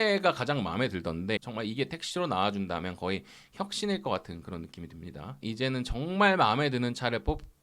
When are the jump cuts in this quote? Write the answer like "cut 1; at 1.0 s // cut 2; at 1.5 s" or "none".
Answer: cut 1; at 1.4 s // cut 2; at 5.4 s